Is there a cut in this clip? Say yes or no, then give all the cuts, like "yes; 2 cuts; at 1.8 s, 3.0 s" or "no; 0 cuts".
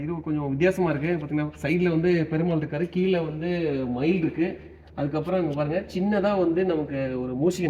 no; 0 cuts